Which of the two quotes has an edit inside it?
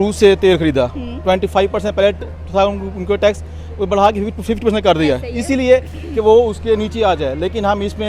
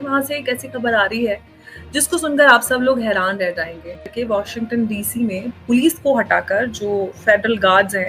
second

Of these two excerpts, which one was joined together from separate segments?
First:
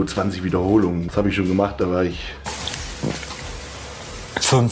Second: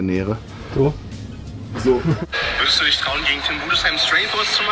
second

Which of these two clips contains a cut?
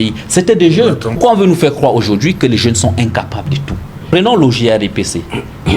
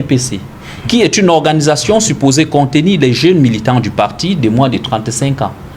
first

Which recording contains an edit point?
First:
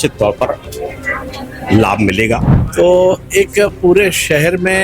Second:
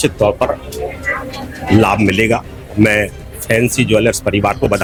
first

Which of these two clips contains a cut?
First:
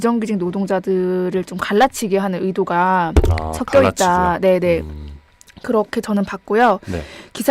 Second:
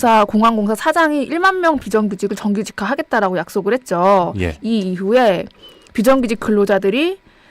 second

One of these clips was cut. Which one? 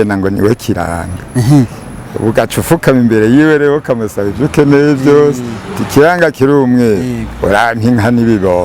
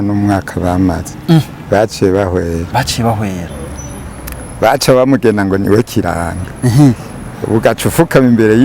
second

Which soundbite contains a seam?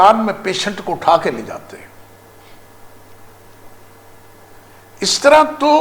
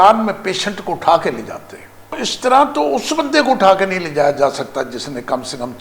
second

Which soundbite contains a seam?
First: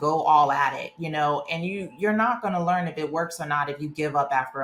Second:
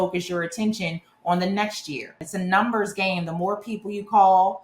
second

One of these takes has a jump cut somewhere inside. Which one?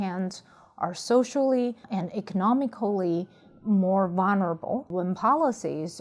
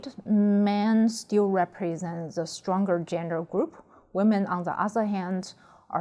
first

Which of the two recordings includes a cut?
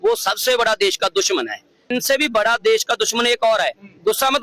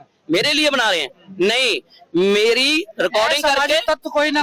first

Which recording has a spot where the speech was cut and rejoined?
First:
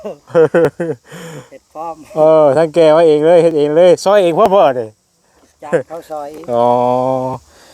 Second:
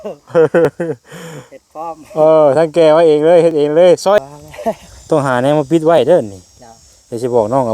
second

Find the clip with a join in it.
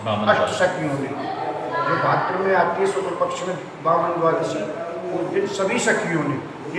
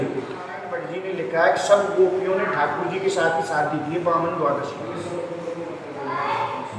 second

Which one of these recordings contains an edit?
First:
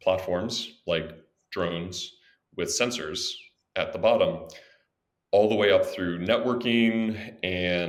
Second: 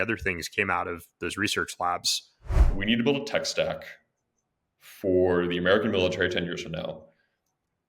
second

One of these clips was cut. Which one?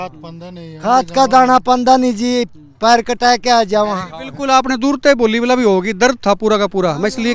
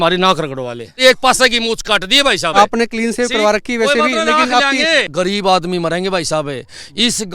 second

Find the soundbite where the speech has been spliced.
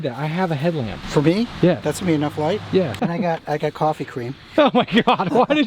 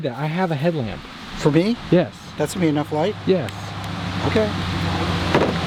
first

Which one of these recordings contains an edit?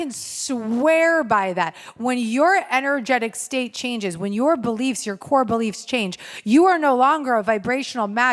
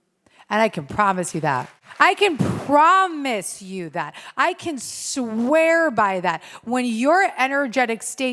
second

